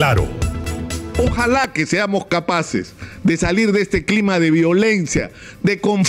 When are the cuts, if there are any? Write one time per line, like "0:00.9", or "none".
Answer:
0:01.0